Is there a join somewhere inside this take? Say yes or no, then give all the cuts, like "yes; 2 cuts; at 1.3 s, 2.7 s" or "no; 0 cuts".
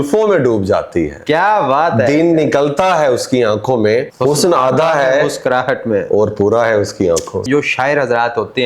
yes; 2 cuts; at 4.1 s, 7.5 s